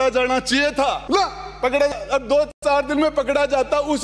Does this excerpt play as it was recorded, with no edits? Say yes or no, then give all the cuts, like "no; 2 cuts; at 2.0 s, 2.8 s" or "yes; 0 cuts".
no; 1 cut; at 1.0 s